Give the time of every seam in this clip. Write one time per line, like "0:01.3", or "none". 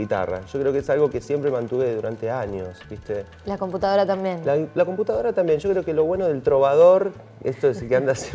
0:01.6